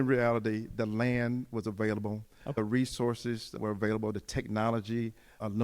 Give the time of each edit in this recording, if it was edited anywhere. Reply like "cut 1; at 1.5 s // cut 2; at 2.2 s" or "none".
cut 1; at 2.6 s // cut 2; at 3.6 s